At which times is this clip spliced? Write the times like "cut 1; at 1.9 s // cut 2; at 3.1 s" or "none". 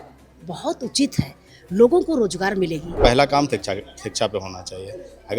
cut 1; at 2.9 s